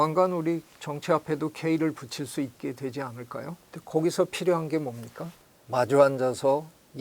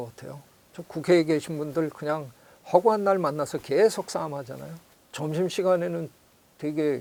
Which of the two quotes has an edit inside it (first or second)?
first